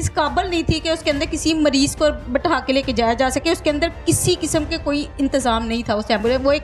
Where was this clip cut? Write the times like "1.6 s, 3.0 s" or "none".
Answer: none